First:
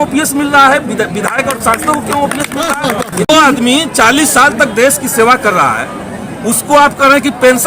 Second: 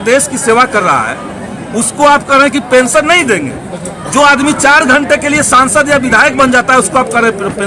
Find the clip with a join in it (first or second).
first